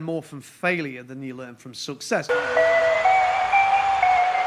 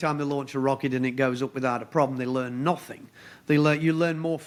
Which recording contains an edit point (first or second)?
first